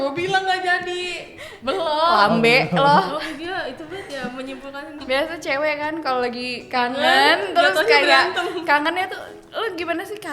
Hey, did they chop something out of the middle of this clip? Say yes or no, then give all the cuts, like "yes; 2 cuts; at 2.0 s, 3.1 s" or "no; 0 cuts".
yes; 1 cut; at 4.9 s